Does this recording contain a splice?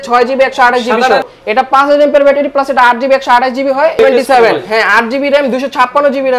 yes; 2 cuts; at 1.3 s, 4.0 s

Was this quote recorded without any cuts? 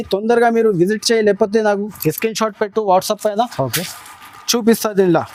yes; 0 cuts

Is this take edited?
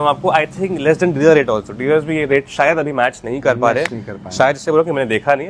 no; 0 cuts

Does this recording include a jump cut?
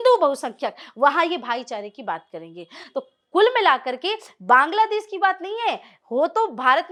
no; 0 cuts

